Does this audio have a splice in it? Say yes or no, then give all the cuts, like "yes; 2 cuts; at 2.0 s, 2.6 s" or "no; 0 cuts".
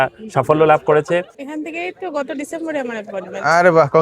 yes; 1 cut; at 1.4 s